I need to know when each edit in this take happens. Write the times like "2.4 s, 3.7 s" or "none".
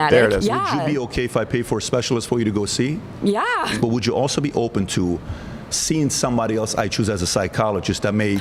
3.8 s